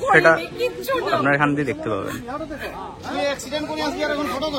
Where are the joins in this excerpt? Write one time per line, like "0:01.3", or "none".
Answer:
none